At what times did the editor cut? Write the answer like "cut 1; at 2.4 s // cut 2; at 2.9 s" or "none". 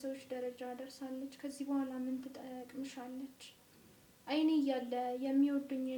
none